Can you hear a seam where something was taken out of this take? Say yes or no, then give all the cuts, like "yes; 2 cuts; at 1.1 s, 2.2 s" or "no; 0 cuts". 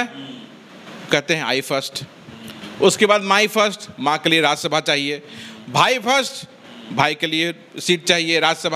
no; 0 cuts